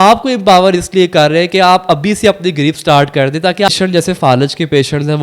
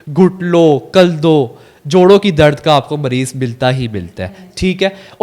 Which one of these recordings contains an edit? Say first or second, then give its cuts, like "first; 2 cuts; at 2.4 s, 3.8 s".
first; 1 cut; at 3.7 s